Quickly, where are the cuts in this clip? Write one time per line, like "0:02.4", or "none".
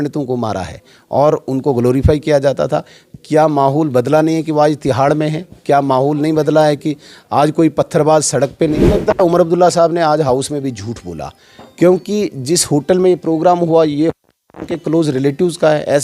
0:09.0